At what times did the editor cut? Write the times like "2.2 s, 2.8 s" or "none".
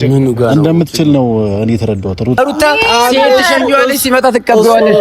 2.4 s